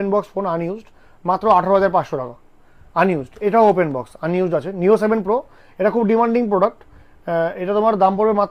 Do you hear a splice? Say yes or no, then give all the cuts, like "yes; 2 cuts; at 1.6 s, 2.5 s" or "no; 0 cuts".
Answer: no; 0 cuts